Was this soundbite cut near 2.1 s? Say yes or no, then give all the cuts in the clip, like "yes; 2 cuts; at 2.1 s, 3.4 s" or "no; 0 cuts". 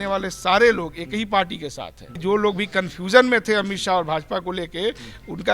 yes; 1 cut; at 2.1 s